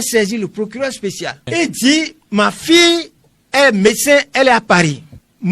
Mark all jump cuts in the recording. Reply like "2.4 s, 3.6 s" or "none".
1.4 s